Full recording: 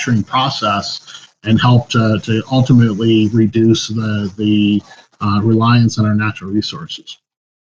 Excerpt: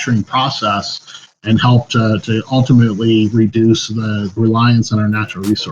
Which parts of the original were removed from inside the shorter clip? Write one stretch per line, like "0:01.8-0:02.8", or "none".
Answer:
0:04.3-0:05.4